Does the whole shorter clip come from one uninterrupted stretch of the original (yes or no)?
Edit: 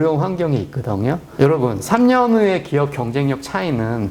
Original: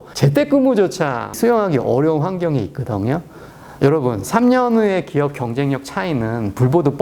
no